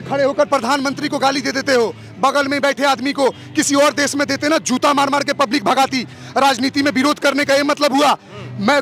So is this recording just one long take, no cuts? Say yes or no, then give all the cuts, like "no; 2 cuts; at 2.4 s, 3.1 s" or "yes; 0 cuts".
yes; 0 cuts